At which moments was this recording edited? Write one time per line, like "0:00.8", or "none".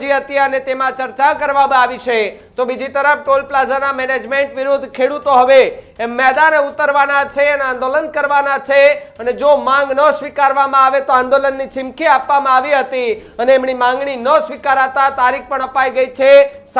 none

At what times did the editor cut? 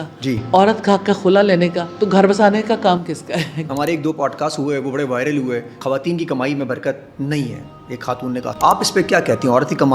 0:03.6
0:05.8
0:08.5

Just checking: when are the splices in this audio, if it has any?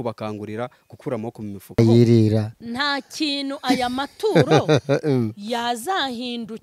0:01.8

